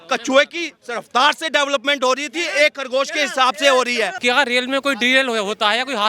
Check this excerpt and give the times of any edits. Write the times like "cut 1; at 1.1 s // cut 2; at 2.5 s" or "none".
cut 1; at 4.2 s